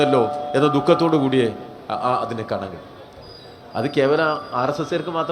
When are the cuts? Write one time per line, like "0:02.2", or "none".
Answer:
none